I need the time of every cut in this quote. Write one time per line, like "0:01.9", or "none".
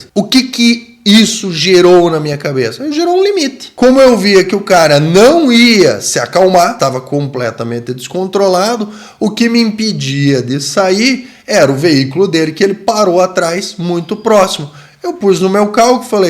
0:03.6
0:06.7